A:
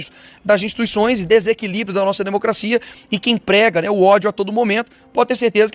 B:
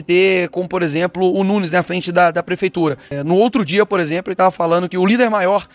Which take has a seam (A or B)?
B